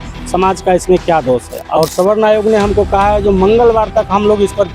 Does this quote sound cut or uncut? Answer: cut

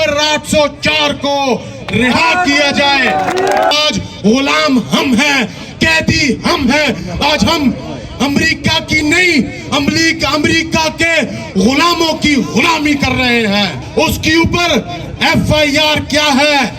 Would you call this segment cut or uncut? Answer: cut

